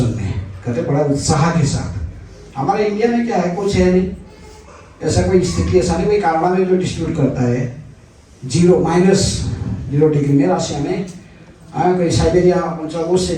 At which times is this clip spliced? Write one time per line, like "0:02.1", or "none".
none